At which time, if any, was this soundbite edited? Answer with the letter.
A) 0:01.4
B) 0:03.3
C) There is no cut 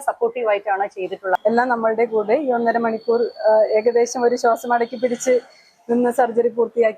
A